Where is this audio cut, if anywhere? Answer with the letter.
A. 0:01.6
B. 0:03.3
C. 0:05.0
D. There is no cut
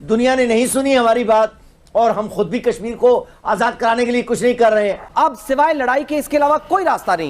C